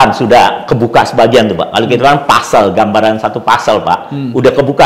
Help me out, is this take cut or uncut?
uncut